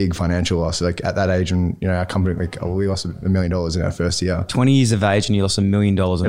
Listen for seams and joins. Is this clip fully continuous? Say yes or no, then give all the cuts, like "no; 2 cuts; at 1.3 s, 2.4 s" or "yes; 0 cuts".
yes; 0 cuts